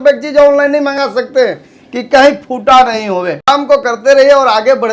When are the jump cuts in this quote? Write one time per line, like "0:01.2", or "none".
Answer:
0:03.5